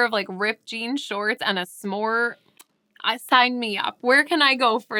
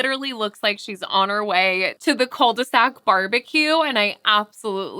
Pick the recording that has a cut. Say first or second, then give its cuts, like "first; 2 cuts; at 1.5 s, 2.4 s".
second; 1 cut; at 1.9 s